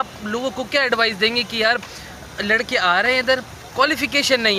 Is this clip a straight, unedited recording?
yes; 0 cuts

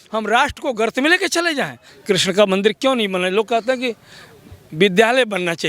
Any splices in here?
yes; 1 cut; at 1.9 s

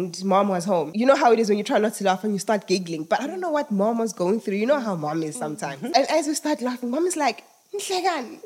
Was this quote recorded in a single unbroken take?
no; 2 cuts; at 0.9 s, 5.9 s

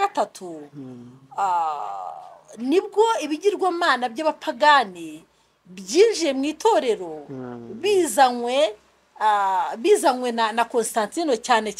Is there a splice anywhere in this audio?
no; 0 cuts

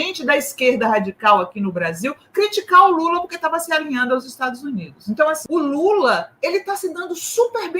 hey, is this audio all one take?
no; 1 cut; at 5.4 s

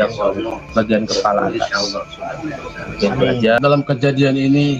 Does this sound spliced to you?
yes; 1 cut; at 3.6 s

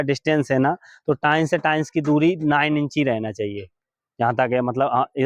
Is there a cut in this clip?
no; 0 cuts

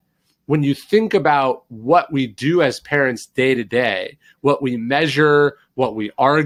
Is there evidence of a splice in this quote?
no; 0 cuts

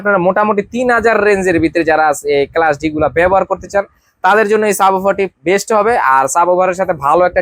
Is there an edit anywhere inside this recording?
no; 0 cuts

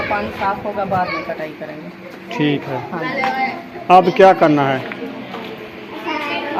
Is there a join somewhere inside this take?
no; 0 cuts

